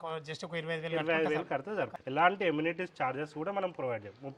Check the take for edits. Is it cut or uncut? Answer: cut